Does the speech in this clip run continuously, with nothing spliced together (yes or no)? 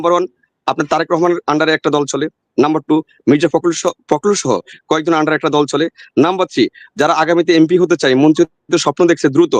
yes